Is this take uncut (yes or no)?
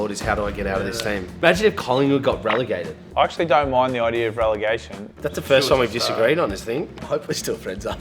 no